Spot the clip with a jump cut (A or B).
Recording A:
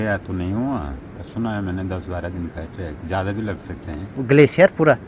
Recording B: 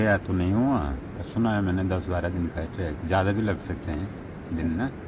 A